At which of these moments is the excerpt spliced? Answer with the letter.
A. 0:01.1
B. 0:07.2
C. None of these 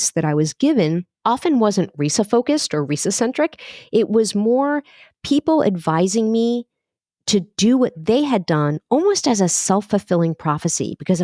A